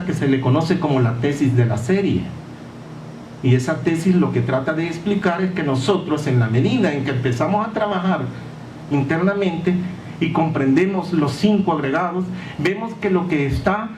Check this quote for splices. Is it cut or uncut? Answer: cut